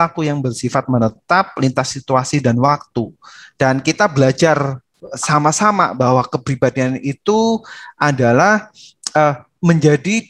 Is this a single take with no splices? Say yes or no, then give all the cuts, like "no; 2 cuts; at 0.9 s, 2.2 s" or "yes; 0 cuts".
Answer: yes; 0 cuts